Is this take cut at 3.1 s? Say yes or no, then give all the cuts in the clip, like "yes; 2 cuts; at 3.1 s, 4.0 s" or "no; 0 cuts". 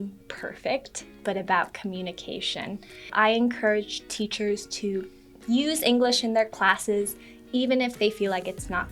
yes; 1 cut; at 3.1 s